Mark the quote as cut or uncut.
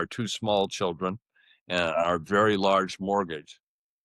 uncut